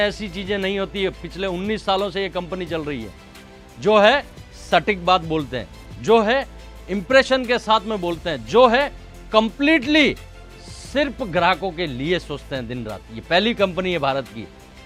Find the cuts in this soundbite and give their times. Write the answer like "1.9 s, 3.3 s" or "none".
none